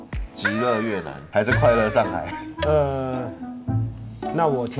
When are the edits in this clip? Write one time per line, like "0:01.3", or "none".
0:01.2